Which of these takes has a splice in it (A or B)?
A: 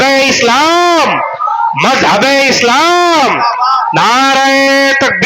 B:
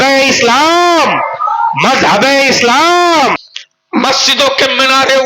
B